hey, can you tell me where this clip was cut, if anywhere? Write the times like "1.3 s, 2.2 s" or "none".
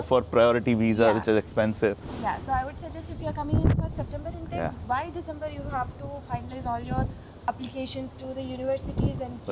none